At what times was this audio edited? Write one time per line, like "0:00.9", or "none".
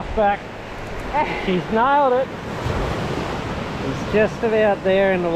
none

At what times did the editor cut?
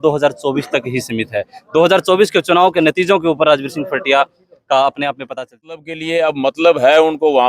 0:06.0

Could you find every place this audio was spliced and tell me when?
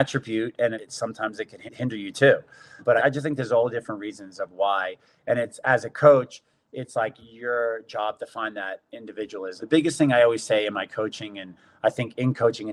none

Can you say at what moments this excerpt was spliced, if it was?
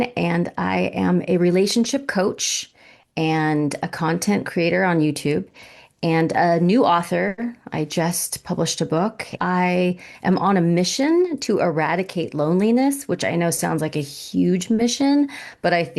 0:09.3

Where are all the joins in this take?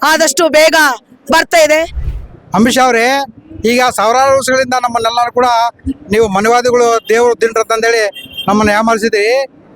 0:02.0

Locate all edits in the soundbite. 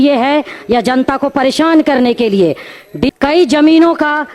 0:03.1

